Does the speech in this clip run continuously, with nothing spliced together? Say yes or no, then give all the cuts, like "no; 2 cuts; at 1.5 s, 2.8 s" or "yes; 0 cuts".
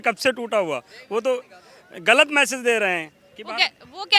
yes; 0 cuts